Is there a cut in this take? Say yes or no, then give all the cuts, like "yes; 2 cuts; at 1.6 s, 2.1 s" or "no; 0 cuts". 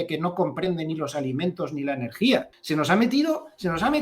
yes; 1 cut; at 2.5 s